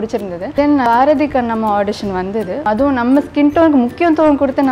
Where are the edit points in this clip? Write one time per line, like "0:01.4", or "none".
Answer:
0:00.8
0:02.6

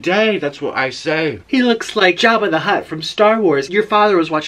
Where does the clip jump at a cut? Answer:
0:01.4
0:02.2
0:03.7

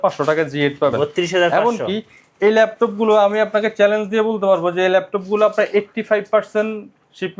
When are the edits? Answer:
none

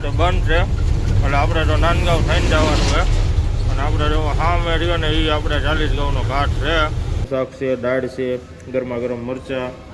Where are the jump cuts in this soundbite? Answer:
0:07.3

